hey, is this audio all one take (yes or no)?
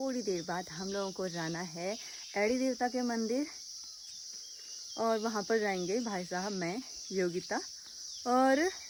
yes